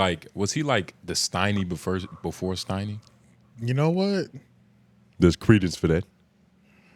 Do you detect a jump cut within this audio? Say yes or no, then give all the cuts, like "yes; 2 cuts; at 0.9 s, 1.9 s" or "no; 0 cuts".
no; 0 cuts